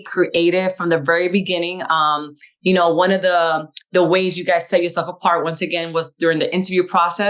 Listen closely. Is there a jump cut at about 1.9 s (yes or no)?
no